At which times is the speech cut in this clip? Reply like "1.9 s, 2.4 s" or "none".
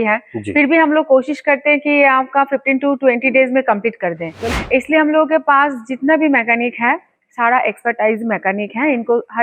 4.4 s

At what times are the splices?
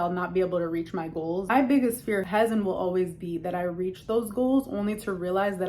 1.5 s, 2.2 s

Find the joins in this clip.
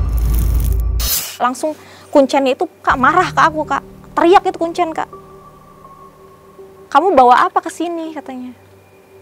1.2 s

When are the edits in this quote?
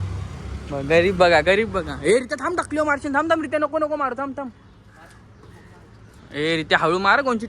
none

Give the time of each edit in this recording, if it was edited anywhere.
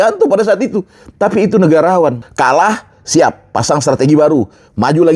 2.3 s

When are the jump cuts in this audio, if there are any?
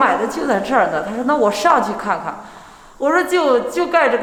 none

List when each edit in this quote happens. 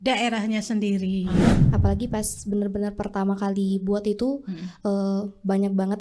1.5 s

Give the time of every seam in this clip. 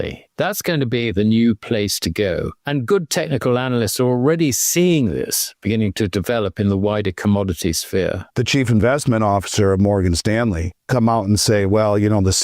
8.3 s

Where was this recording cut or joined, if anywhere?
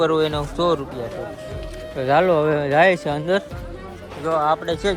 none

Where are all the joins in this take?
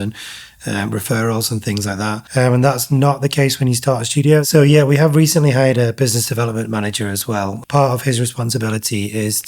4.5 s, 7.6 s

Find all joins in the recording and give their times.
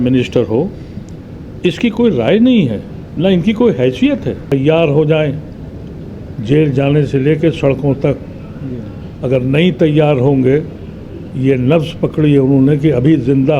4.5 s

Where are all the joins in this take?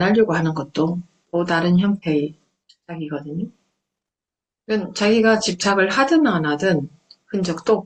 none

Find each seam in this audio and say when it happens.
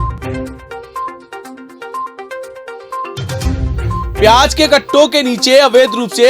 4.2 s

